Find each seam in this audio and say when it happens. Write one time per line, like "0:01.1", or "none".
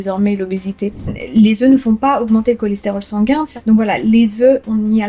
0:01.1
0:03.5